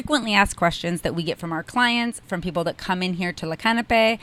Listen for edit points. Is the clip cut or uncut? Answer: uncut